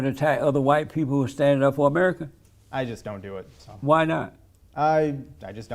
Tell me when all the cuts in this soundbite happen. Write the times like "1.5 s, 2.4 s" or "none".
none